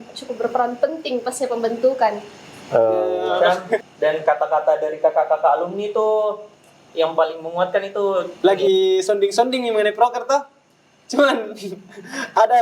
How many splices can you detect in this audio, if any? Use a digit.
2